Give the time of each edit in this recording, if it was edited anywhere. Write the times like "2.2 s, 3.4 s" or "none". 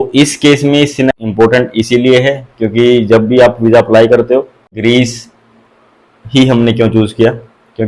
1.1 s, 4.7 s